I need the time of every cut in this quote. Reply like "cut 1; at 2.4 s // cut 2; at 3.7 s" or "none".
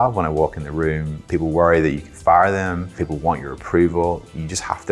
cut 1; at 1.1 s // cut 2; at 3.0 s